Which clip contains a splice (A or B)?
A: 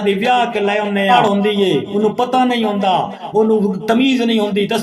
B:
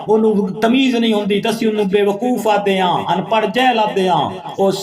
A